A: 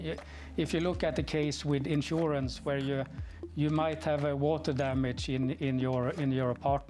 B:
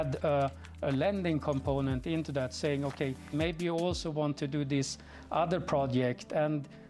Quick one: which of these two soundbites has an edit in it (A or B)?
B